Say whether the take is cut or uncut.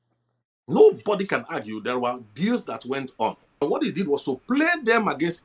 cut